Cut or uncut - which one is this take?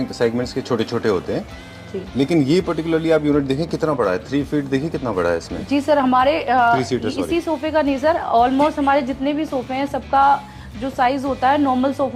uncut